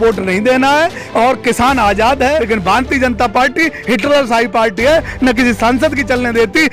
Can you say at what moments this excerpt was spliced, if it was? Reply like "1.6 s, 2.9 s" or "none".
2.4 s